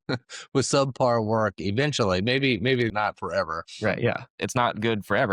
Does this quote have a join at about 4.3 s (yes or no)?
yes